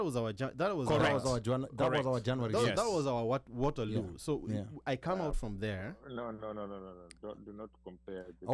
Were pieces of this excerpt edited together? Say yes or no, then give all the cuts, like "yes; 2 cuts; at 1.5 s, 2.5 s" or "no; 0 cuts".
no; 0 cuts